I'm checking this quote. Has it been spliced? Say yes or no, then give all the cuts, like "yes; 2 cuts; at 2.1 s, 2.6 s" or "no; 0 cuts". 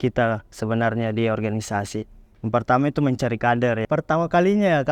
yes; 1 cut; at 3.8 s